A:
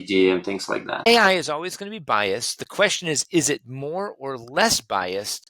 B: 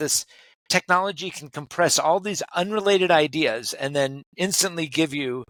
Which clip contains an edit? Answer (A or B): A